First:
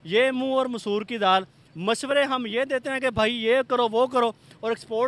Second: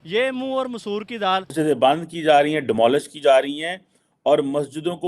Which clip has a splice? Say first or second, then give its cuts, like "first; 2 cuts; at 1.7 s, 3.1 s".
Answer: second; 1 cut; at 1.5 s